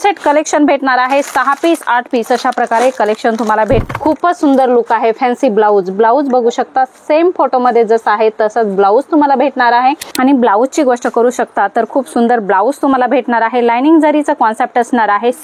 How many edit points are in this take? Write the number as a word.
two